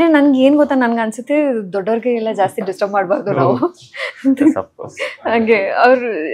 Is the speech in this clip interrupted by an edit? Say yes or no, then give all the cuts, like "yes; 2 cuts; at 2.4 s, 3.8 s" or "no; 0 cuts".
no; 0 cuts